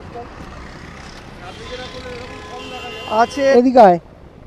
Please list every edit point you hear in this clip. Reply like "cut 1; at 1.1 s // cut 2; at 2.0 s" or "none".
cut 1; at 3.3 s

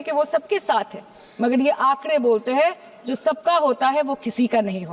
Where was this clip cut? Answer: none

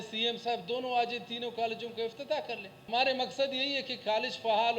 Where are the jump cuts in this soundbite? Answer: cut 1; at 2.7 s

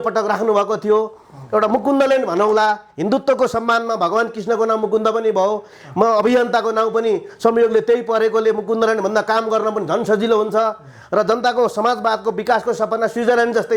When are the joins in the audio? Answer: none

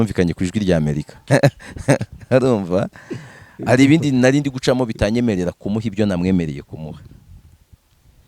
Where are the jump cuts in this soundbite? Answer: cut 1; at 1.1 s

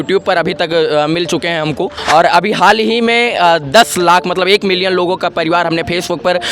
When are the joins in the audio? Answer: cut 1; at 1.9 s

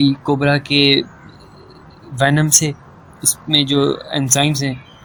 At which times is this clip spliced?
none

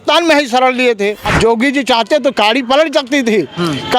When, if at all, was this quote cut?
cut 1; at 1.2 s

